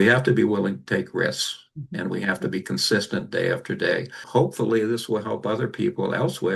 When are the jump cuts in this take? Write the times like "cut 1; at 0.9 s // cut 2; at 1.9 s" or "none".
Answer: cut 1; at 4.2 s